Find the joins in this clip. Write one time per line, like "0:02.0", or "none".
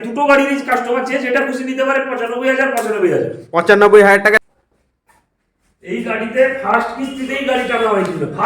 0:04.4